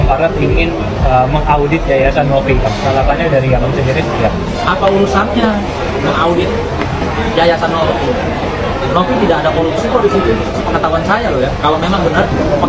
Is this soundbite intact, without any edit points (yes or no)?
yes